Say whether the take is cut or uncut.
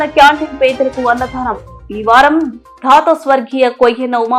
uncut